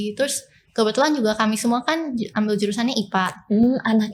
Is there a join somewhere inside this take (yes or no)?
no